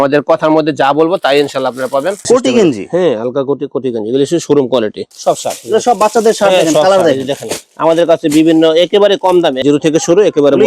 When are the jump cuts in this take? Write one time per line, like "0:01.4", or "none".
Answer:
0:02.3
0:05.1
0:09.6